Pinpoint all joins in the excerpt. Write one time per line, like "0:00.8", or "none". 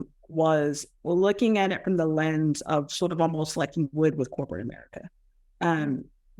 none

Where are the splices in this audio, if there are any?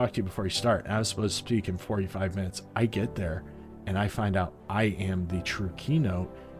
none

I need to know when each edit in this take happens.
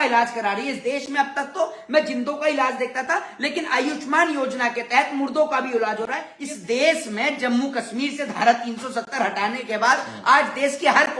0:06.3

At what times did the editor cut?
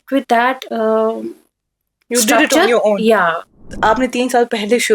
0:03.7

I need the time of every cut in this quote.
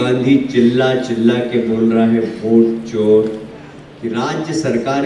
0:03.4

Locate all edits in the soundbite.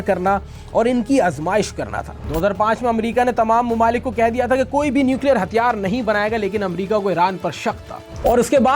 0:02.2

